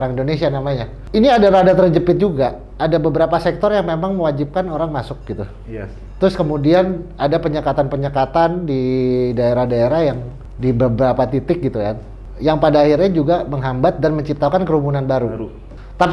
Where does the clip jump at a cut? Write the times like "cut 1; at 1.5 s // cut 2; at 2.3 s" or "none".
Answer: none